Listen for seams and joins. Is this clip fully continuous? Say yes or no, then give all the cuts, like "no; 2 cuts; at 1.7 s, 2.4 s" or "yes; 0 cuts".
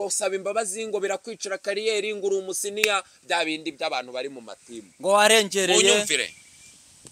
yes; 0 cuts